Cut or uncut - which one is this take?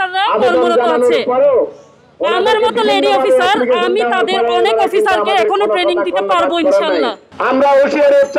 cut